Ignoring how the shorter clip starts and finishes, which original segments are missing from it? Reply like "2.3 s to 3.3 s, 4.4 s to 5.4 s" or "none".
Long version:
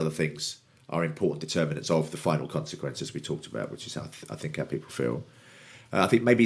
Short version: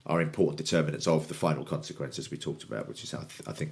none